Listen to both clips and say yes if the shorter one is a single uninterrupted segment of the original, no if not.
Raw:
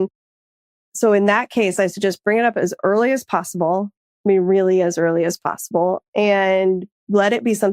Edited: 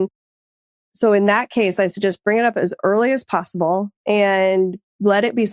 no